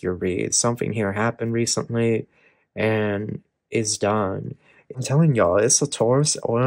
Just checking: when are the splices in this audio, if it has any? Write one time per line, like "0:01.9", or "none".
0:05.0